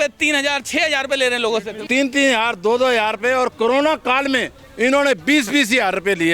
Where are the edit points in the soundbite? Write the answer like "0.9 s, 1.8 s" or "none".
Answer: 1.8 s